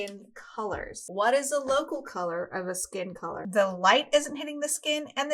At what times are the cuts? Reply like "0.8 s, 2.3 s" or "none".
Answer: 1.0 s, 3.4 s